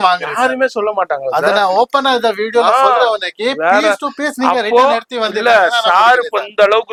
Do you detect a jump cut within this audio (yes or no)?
no